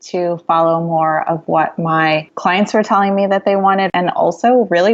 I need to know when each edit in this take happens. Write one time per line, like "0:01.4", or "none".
0:03.9